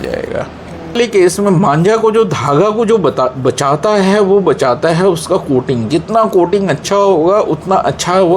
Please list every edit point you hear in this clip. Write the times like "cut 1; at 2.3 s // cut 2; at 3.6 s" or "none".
cut 1; at 1.0 s